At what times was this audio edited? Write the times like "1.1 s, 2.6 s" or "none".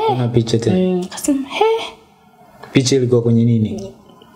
none